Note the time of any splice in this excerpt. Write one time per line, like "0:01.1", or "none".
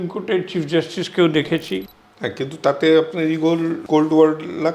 0:01.8
0:03.8

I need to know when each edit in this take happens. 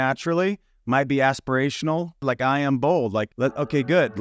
0:02.2
0:03.3

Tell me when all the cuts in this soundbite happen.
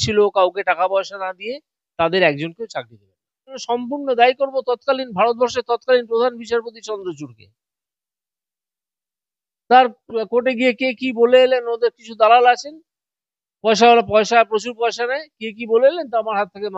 0:03.6

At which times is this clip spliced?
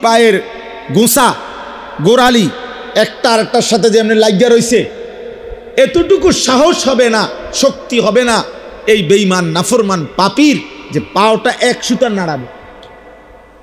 none

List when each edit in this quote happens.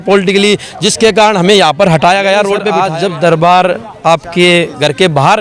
0:02.7

